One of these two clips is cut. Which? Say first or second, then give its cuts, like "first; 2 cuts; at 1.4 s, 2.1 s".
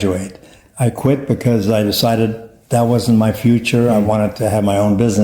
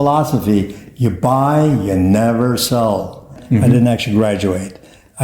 second; 1 cut; at 3.4 s